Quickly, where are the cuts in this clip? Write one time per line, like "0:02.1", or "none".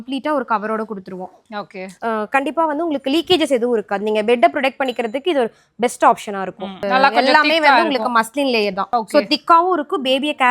0:01.9
0:06.8